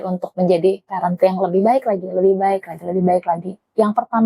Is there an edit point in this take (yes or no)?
no